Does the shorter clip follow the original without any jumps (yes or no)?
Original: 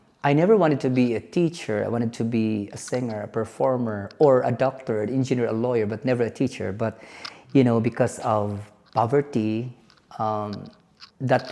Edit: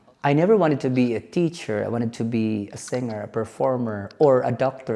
yes